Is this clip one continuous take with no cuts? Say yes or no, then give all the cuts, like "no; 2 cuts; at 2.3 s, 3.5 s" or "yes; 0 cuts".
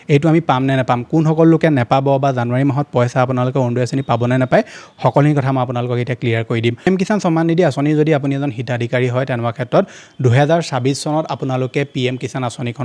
no; 1 cut; at 6.9 s